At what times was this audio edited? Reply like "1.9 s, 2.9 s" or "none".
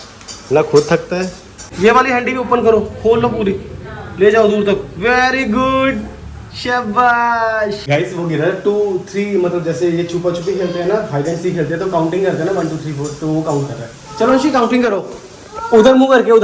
1.6 s, 7.8 s